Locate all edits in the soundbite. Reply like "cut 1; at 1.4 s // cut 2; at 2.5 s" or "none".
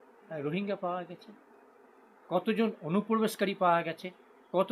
none

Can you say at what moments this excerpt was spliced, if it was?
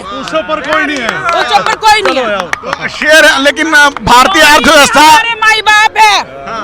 none

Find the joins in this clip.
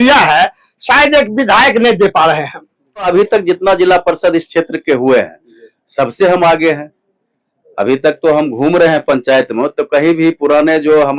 cut 1; at 3.0 s

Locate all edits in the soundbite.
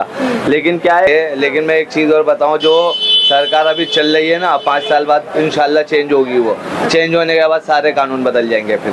cut 1; at 1.1 s

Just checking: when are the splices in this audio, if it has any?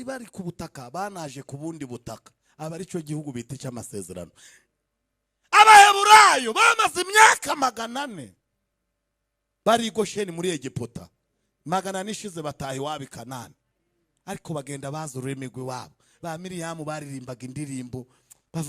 none

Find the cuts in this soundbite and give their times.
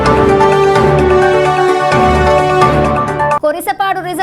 cut 1; at 1.1 s

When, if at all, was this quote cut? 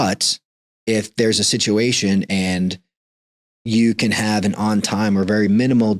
none

